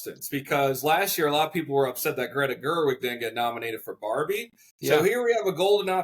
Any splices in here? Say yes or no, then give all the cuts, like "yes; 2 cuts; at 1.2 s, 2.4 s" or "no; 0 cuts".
no; 0 cuts